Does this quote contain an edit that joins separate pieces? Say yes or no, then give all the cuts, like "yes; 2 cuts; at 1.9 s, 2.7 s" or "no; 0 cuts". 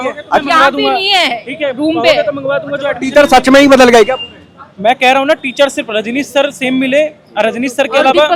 no; 0 cuts